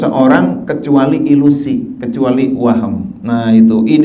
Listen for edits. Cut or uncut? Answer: uncut